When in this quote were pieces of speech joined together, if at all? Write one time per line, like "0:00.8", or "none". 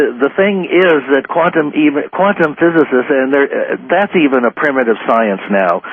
none